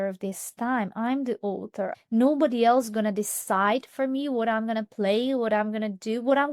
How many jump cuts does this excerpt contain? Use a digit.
1